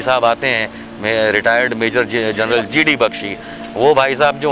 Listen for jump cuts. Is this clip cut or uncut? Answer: uncut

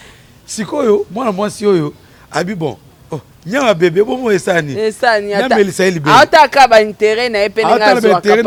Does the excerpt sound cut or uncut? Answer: uncut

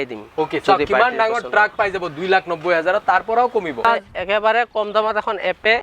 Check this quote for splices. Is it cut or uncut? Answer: cut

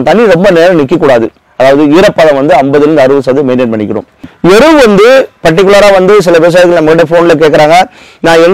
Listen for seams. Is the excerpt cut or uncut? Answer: cut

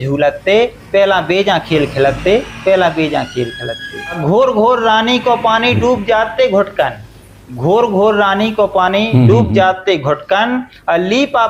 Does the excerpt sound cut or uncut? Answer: uncut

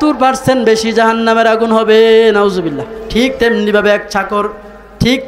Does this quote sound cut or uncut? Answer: cut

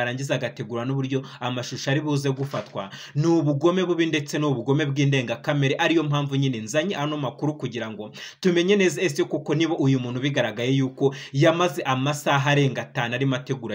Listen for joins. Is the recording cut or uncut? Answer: uncut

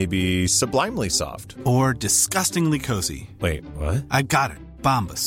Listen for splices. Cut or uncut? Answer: uncut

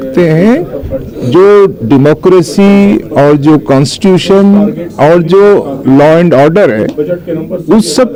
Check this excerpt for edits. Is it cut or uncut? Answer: uncut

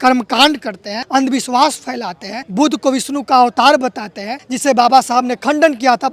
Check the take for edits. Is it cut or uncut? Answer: uncut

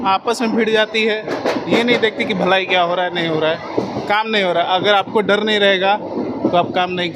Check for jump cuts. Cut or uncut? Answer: uncut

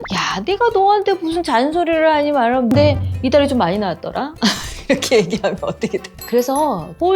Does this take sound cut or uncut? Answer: cut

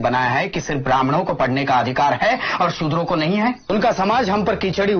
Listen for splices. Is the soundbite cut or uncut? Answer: cut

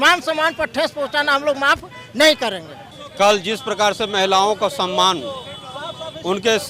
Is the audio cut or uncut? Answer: cut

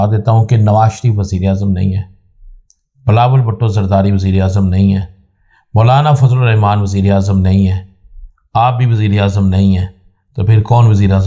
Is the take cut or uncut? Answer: uncut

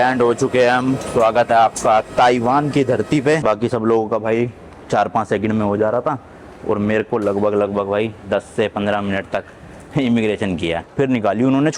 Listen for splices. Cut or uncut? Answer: cut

